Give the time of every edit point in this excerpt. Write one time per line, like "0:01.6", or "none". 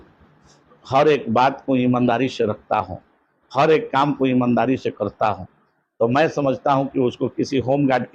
none